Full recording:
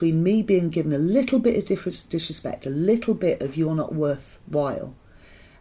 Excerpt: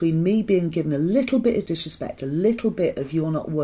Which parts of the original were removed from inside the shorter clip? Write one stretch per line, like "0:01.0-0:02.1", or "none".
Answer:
0:01.6-0:02.1